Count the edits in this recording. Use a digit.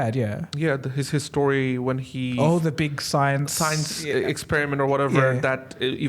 1